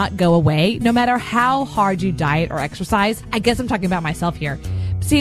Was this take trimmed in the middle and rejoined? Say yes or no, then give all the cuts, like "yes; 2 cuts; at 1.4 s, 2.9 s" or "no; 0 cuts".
yes; 1 cut; at 3.2 s